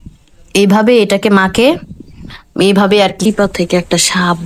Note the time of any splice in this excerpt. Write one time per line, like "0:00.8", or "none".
0:03.2